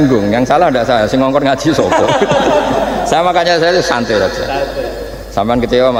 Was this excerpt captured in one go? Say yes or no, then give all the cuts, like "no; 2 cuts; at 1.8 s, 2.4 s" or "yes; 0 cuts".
yes; 0 cuts